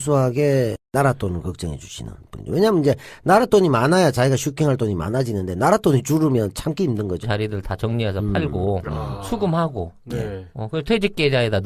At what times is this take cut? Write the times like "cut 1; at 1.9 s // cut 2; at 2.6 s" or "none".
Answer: none